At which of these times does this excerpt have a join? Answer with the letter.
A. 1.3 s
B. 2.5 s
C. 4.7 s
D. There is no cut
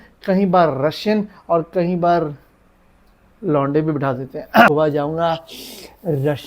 C